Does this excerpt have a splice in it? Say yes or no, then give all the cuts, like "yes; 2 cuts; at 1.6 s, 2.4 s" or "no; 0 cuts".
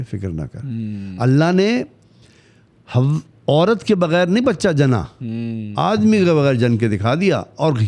no; 0 cuts